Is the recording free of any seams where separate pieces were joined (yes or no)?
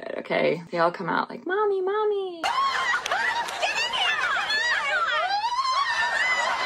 yes